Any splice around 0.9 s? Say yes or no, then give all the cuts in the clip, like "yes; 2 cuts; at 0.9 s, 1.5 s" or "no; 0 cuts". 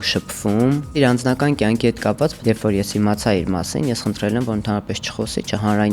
yes; 2 cuts; at 0.9 s, 2.4 s